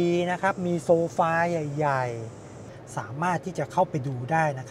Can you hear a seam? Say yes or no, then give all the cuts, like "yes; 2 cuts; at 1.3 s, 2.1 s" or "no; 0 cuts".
yes; 1 cut; at 2.6 s